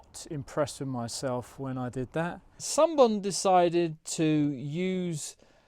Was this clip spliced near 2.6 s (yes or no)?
yes